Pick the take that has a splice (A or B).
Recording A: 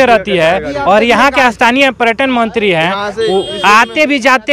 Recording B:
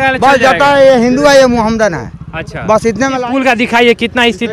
B